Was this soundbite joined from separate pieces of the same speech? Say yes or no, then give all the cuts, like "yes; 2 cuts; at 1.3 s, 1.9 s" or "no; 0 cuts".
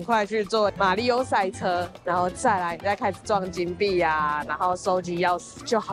no; 0 cuts